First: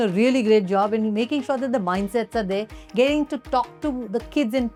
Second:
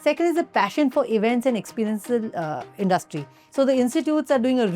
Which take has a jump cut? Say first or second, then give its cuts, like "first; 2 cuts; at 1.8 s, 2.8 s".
second; 1 cut; at 3.4 s